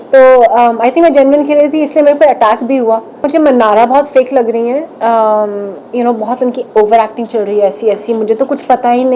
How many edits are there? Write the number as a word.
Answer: one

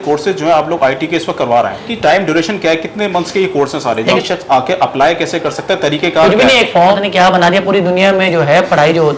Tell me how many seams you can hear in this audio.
three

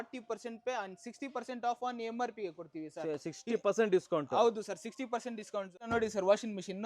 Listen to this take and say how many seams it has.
one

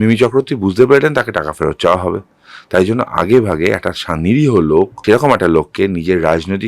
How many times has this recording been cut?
one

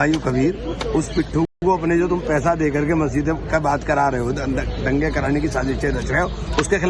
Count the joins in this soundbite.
zero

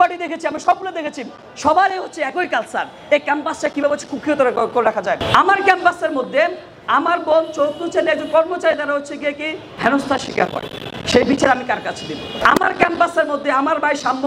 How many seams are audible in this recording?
three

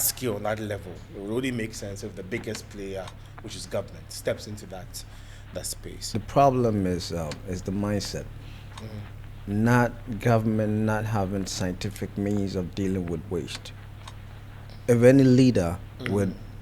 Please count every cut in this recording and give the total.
one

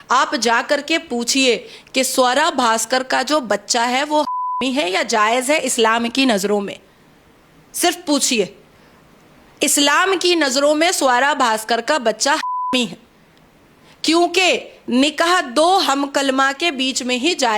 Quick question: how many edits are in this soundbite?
zero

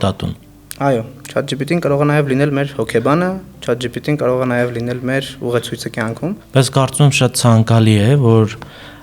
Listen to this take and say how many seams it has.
one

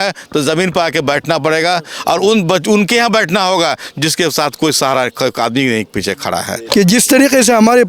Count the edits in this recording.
one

